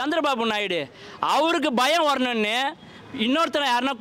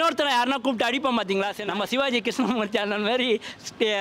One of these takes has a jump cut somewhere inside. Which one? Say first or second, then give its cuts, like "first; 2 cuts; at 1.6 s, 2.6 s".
second; 1 cut; at 1.6 s